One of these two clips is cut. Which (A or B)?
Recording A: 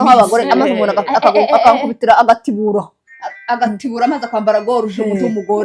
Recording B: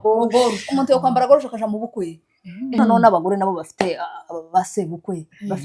B